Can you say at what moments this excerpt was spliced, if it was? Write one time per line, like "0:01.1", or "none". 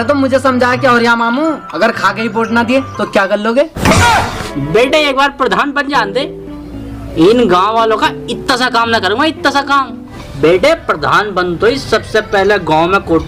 0:04.4
0:10.2